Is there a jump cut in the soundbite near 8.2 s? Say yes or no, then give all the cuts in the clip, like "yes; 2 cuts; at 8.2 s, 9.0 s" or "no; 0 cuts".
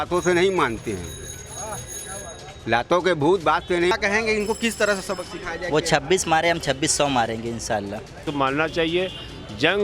yes; 2 cuts; at 3.9 s, 8.2 s